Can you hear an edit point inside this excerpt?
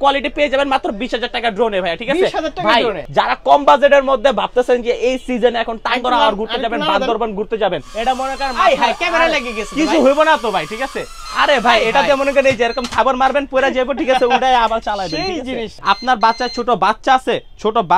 yes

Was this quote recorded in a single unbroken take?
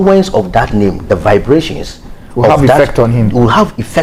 yes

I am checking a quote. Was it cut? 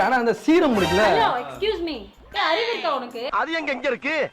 yes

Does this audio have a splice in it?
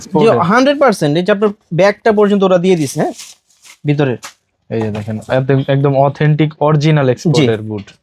no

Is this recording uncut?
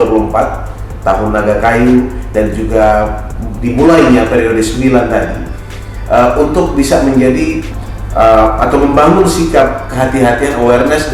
no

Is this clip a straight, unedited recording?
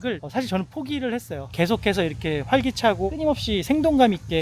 no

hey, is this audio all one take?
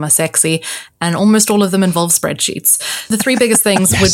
no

